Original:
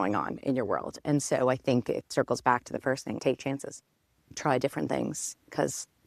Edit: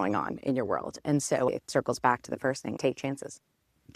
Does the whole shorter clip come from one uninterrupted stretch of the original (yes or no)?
no